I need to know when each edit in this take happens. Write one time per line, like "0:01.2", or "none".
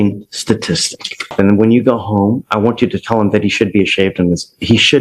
0:01.3